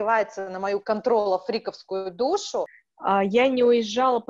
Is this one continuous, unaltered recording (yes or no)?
no